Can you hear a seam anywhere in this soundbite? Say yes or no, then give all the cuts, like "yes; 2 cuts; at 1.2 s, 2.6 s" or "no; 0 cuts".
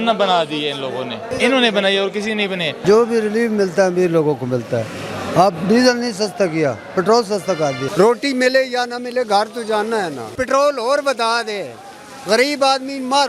yes; 4 cuts; at 1.2 s, 2.8 s, 7.8 s, 10.3 s